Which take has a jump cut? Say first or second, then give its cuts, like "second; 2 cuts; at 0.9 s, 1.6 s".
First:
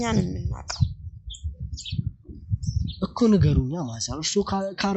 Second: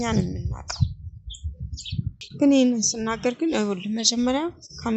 second; 1 cut; at 2.2 s